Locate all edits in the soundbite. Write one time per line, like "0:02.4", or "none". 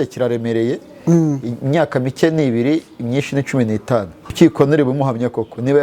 0:04.2

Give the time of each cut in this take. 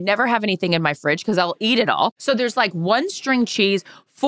0:02.2

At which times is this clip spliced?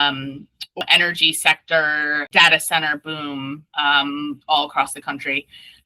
0:00.8
0:02.3

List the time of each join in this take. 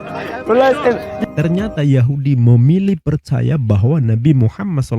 0:01.3

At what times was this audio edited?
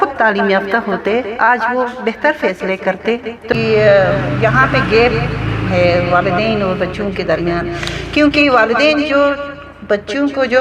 0:03.5

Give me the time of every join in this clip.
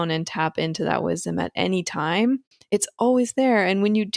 none

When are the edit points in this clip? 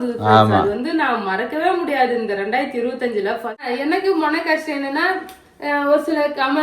0:03.7

